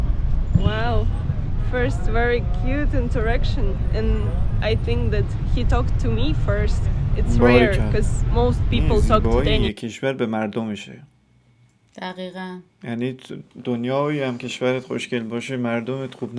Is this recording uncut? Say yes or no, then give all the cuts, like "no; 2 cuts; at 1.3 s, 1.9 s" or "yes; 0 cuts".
yes; 0 cuts